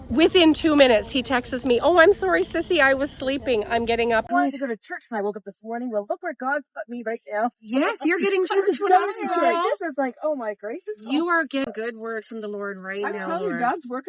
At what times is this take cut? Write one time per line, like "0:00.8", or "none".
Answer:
0:04.2
0:11.7